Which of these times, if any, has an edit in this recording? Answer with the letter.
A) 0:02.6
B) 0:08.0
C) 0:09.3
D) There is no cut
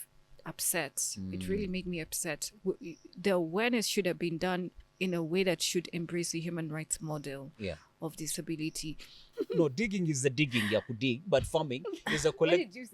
C